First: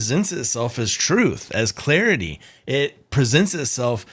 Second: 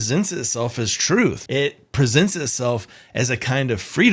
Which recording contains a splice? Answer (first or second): second